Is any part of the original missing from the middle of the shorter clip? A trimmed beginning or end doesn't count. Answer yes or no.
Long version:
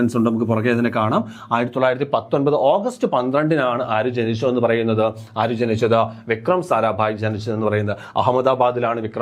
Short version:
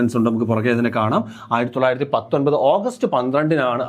no